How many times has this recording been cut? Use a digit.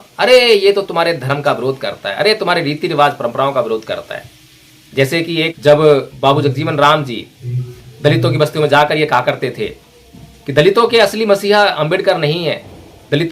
1